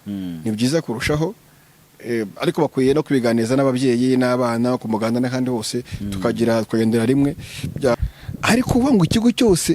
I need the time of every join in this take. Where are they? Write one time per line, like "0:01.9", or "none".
0:07.9